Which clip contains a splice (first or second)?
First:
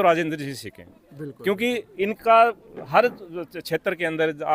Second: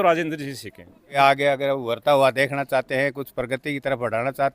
second